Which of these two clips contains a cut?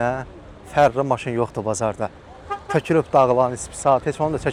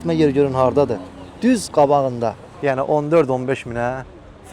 second; 1 cut; at 2.5 s

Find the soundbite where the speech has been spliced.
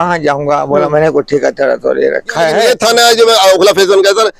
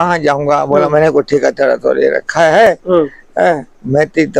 first; 1 cut; at 2.6 s

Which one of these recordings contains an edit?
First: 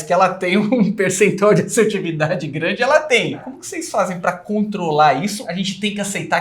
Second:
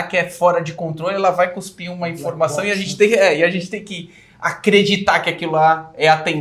first; 2 cuts; at 3.6 s, 5.4 s

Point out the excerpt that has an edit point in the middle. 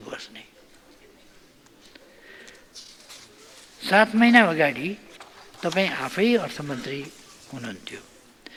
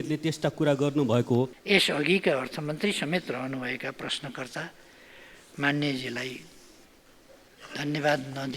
second; 1 cut; at 1.6 s

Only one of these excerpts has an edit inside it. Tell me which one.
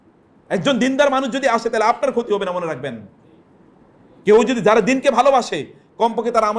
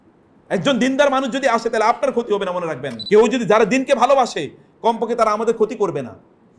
second; 1 cut; at 2.9 s

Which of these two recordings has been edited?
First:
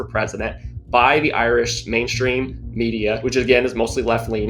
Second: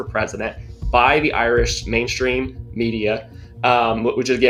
first; 1 cut; at 3.2 s

